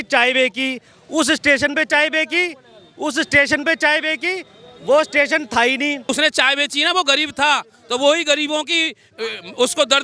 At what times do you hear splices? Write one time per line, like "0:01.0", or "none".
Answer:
0:06.0